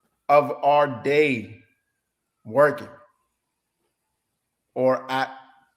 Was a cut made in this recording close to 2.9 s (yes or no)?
no